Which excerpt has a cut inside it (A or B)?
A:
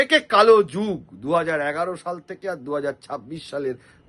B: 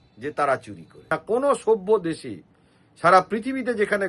B